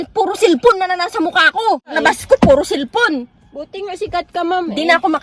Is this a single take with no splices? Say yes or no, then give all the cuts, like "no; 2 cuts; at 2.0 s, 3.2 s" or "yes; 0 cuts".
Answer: no; 1 cut; at 1.9 s